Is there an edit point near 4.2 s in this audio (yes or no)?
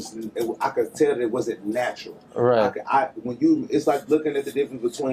no